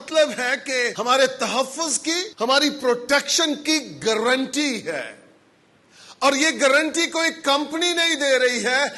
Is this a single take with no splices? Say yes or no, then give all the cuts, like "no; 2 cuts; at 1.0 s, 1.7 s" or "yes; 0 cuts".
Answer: no; 2 cuts; at 0.9 s, 2.3 s